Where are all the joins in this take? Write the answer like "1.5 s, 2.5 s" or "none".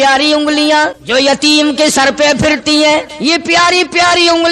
1.0 s, 3.1 s

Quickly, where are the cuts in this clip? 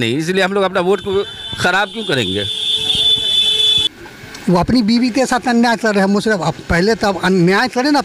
3.8 s

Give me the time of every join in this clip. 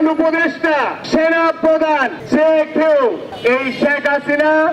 1.0 s, 2.2 s, 3.3 s

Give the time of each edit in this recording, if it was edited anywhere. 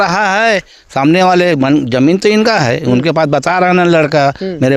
none

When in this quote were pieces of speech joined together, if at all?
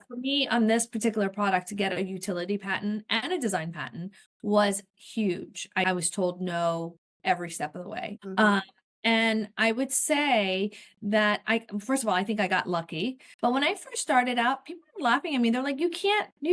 5.8 s, 8.1 s, 13.2 s

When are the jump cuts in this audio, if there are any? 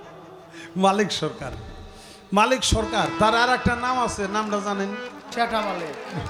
none

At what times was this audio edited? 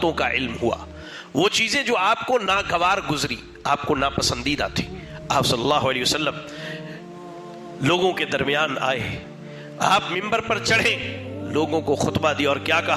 none

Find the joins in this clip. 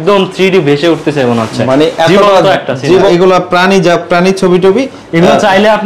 3.1 s

